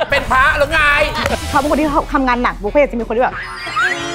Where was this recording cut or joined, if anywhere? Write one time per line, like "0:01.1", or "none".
0:01.4